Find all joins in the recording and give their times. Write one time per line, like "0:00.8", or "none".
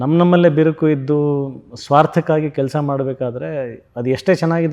none